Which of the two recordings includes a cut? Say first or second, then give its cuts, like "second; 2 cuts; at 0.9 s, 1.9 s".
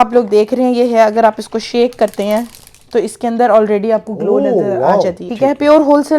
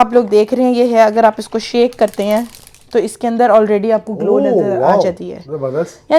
first; 1 cut; at 5.2 s